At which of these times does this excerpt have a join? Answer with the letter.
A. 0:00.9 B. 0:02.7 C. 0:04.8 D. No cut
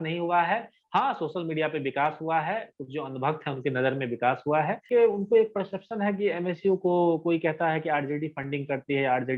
C